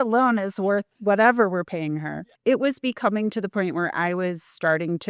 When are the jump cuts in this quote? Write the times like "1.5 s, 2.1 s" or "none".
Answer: 0.9 s